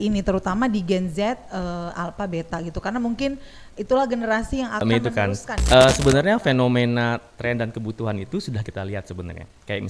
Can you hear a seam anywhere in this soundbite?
yes; 1 cut; at 4.8 s

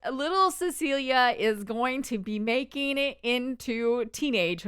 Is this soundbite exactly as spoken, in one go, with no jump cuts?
yes; 0 cuts

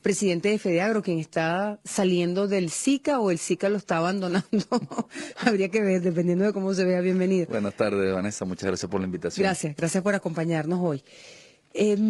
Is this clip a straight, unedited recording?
yes; 0 cuts

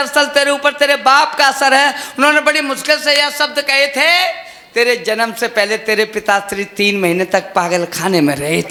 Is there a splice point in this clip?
no; 0 cuts

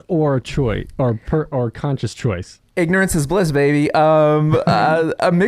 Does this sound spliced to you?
no; 0 cuts

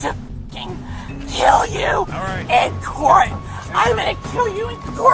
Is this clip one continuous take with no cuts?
yes; 0 cuts

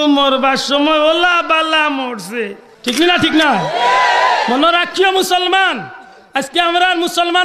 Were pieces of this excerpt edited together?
yes; 1 cut; at 2.7 s

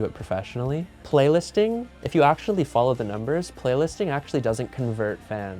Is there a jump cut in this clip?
yes; 1 cut; at 0.9 s

